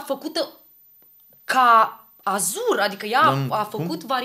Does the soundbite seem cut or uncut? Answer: uncut